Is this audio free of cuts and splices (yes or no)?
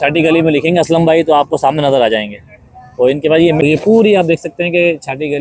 no